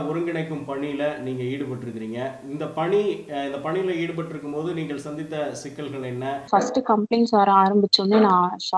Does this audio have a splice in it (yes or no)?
yes